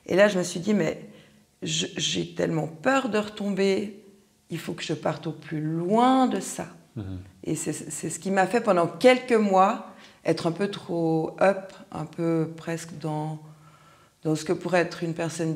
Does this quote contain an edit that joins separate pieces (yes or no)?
no